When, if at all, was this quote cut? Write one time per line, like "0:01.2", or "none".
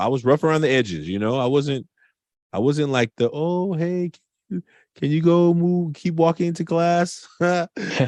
none